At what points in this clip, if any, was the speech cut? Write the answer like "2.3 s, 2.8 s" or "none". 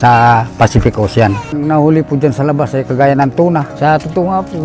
1.4 s